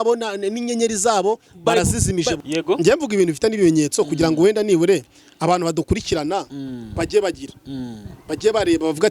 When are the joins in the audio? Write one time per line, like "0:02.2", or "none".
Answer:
0:02.4